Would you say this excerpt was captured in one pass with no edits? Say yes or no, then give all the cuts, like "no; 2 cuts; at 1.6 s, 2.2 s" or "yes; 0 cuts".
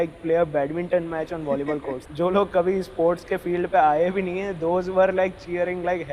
no; 1 cut; at 2.0 s